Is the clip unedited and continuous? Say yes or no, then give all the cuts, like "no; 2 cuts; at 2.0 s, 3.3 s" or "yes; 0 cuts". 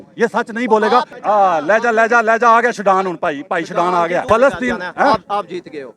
no; 2 cuts; at 1.1 s, 4.2 s